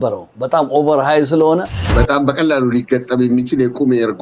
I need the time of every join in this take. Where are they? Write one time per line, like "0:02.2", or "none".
0:01.8